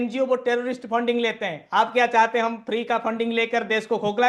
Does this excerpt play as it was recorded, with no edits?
yes; 0 cuts

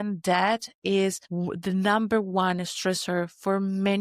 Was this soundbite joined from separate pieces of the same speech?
yes; 1 cut; at 1.2 s

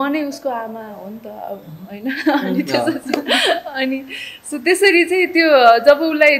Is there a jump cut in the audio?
no; 0 cuts

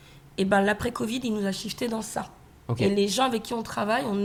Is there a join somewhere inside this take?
no; 0 cuts

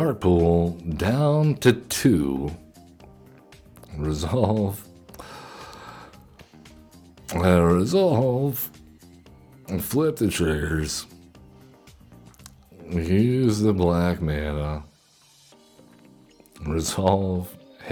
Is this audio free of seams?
yes; 0 cuts

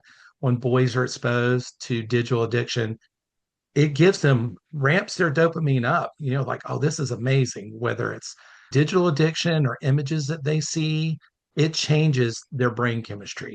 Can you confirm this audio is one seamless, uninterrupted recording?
no; 2 cuts; at 8.6 s, 11.5 s

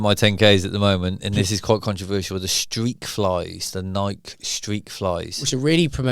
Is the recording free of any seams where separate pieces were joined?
yes; 0 cuts

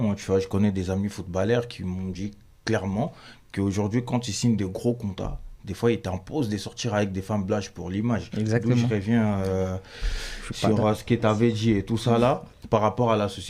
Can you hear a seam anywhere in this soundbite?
no; 0 cuts

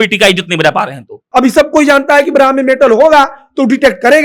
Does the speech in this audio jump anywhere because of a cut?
yes; 1 cut; at 1.2 s

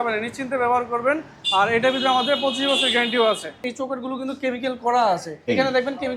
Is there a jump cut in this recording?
yes; 2 cuts; at 3.7 s, 5.3 s

